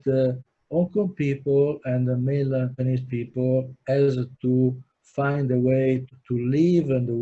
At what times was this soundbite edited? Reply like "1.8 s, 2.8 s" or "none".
none